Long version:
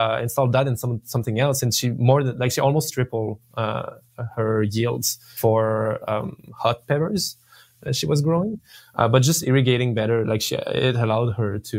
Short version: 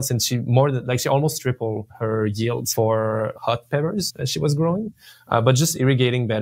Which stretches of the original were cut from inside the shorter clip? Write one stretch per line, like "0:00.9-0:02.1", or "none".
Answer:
0:03.4-0:04.3
0:05.0-0:05.3
0:06.0-0:06.5
0:07.3-0:07.8